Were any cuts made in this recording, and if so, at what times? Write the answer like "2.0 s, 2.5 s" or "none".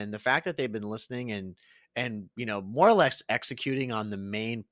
none